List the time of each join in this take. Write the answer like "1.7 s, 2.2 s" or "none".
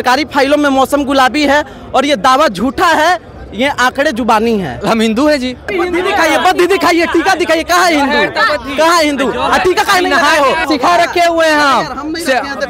4.8 s, 5.7 s, 10.6 s